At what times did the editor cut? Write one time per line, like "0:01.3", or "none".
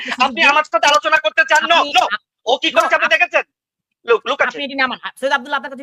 none